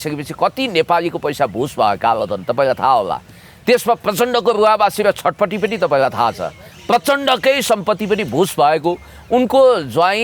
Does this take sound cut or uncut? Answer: uncut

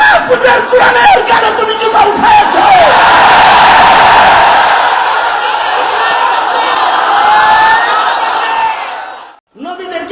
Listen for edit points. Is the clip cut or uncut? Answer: cut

